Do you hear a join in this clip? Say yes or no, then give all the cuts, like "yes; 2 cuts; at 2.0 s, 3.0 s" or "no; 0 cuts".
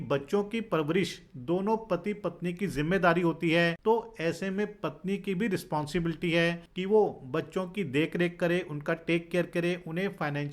yes; 2 cuts; at 3.8 s, 6.7 s